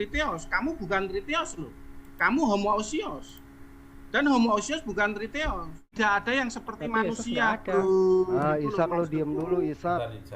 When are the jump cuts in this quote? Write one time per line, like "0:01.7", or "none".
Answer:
0:05.9